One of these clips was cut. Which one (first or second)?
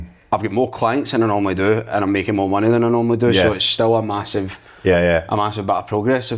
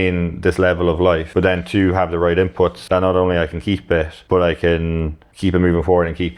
second